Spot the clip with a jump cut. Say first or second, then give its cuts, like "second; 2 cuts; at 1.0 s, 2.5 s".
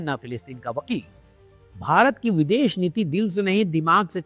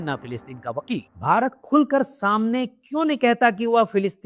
second; 1 cut; at 1.1 s